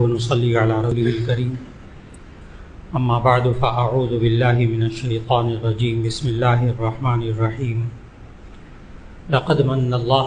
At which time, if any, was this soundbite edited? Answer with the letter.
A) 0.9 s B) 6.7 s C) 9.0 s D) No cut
A